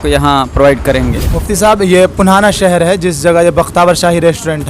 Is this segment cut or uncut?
cut